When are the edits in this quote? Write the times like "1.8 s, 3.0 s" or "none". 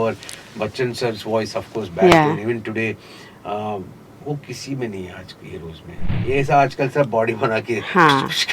6.1 s